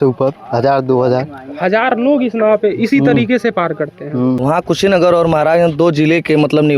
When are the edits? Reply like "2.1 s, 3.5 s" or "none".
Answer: 4.4 s

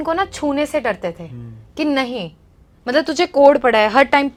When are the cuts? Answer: none

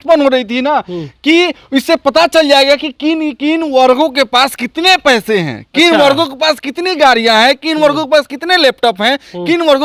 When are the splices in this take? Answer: none

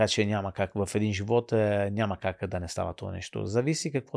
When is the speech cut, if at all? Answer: none

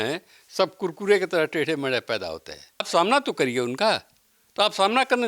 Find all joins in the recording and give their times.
2.9 s

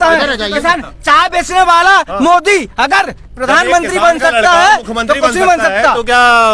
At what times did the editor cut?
none

